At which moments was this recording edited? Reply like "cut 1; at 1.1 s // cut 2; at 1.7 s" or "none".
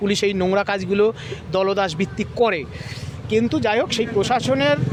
none